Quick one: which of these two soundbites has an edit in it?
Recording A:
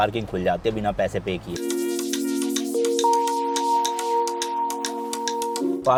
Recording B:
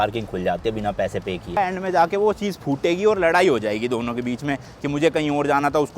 B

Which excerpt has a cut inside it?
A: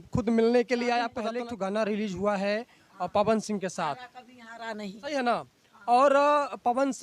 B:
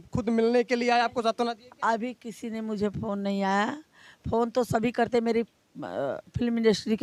A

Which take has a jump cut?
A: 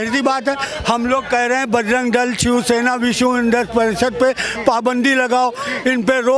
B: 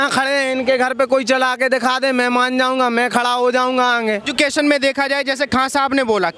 B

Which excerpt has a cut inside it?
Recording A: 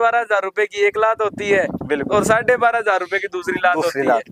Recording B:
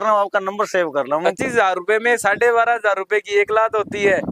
B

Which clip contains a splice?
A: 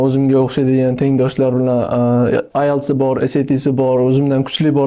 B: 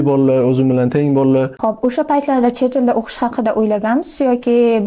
B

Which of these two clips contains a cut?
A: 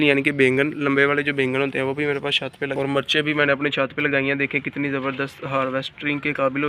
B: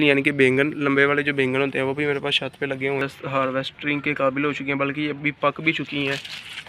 B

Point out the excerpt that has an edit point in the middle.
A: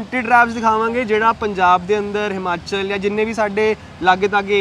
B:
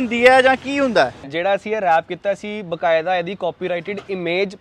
B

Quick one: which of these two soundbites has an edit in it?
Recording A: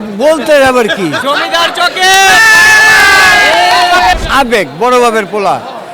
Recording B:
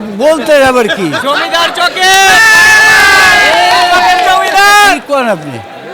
A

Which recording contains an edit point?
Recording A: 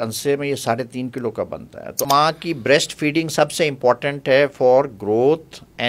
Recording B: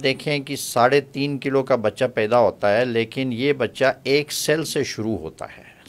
A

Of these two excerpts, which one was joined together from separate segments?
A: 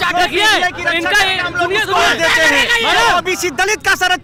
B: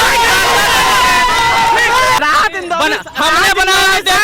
B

